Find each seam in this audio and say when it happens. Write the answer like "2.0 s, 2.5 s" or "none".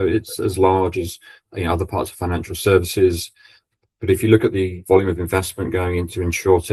none